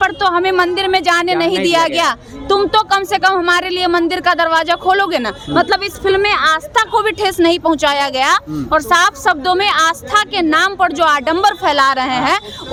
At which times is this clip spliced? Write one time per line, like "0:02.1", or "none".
none